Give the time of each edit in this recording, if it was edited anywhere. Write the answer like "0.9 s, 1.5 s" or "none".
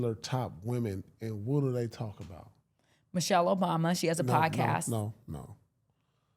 none